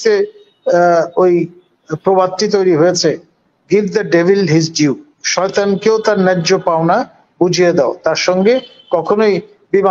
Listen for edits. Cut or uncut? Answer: uncut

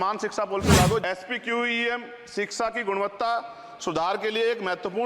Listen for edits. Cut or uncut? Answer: cut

